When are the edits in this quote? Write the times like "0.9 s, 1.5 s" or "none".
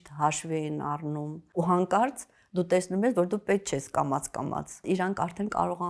1.4 s, 4.8 s